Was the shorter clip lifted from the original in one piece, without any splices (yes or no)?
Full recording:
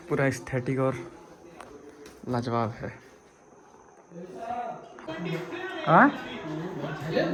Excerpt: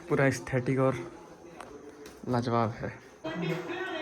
no